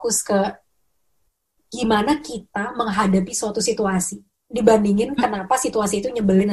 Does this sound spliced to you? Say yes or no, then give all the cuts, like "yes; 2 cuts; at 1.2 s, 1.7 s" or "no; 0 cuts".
no; 0 cuts